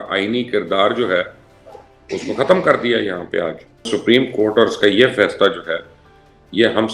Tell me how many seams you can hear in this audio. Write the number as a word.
one